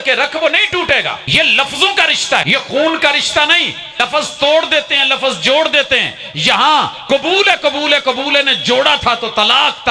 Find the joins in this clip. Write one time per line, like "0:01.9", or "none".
0:01.2
0:02.4
0:04.0